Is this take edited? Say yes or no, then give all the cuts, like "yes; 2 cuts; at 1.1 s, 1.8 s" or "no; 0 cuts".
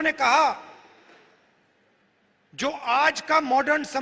yes; 1 cut; at 2.0 s